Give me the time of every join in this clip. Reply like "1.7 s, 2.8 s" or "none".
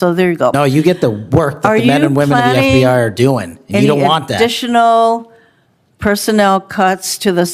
none